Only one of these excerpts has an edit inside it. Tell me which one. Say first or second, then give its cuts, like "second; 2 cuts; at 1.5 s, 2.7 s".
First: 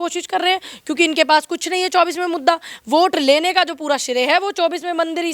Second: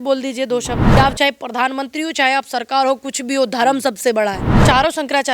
second; 2 cuts; at 1.0 s, 4.5 s